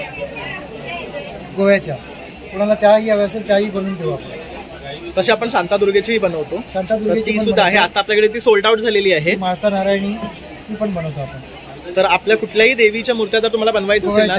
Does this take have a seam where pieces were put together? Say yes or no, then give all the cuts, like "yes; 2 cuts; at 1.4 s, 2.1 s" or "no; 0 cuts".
no; 0 cuts